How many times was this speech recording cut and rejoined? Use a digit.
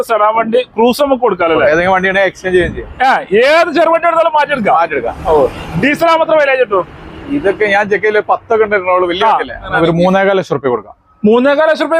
2